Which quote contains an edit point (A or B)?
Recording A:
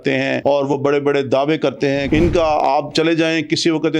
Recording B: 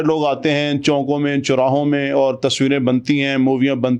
A